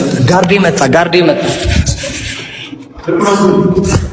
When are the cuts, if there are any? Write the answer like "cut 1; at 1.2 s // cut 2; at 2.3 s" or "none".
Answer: cut 1; at 1.8 s